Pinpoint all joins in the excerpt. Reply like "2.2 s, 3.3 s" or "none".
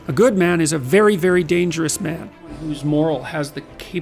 2.7 s